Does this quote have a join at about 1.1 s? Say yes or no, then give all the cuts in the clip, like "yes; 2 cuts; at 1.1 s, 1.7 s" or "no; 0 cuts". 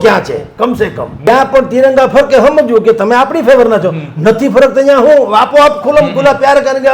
yes; 1 cut; at 1.1 s